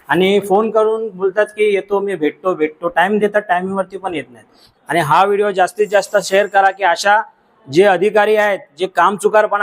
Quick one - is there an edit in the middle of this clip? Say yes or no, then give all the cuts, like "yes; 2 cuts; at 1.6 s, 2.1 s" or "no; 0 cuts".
yes; 1 cut; at 4.7 s